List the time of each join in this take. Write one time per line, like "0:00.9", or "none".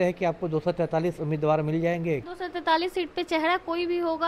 0:02.2